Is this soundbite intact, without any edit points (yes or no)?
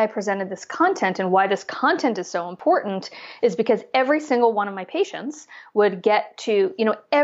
yes